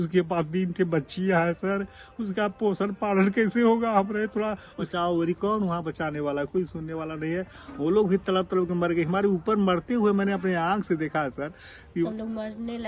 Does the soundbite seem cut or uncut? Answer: cut